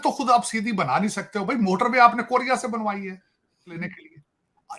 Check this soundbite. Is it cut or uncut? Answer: uncut